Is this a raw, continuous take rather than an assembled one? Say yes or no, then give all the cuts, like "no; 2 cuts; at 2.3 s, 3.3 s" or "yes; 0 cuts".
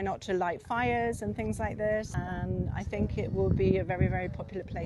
no; 1 cut; at 2.1 s